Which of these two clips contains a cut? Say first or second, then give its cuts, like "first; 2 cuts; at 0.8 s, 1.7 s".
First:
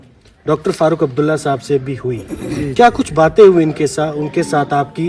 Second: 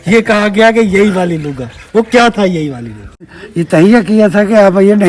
second; 1 cut; at 3.2 s